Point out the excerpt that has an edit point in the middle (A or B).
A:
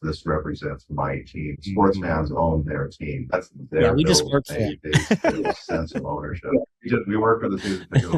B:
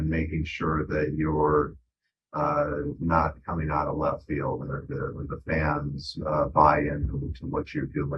A